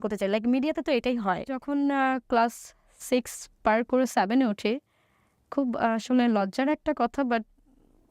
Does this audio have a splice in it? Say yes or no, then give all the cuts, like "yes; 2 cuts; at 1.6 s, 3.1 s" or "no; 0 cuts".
yes; 1 cut; at 1.6 s